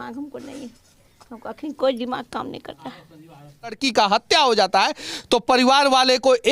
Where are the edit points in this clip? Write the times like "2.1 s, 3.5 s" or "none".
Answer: 3.8 s